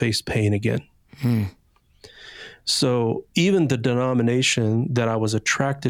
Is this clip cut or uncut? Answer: uncut